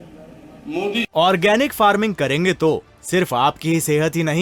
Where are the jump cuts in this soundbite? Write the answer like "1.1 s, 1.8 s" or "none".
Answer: 1.1 s